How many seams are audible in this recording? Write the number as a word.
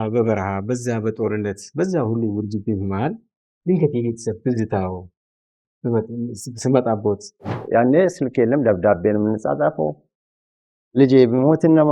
one